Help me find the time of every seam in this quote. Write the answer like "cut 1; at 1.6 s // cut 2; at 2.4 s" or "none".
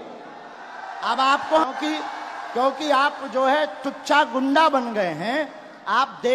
cut 1; at 1.7 s

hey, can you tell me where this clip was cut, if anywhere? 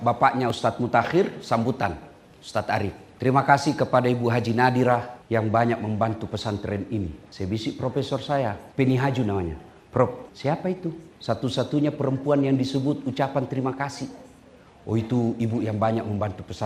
cut 1; at 3.0 s // cut 2; at 5.1 s // cut 3; at 7.2 s // cut 4; at 8.6 s // cut 5; at 10.7 s

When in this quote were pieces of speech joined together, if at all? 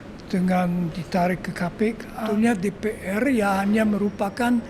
cut 1; at 2.2 s

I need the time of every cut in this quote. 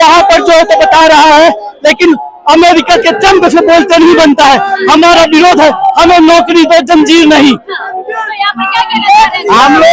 none

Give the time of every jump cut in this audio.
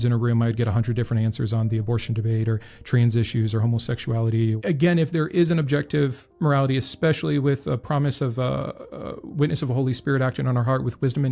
cut 1; at 4.6 s

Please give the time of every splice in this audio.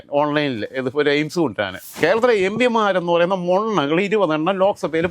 cut 1; at 1.8 s

